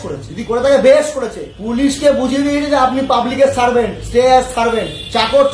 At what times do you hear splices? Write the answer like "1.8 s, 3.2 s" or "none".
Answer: none